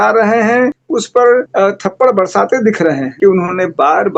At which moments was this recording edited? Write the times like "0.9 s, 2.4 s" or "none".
0.8 s, 1.5 s, 3.1 s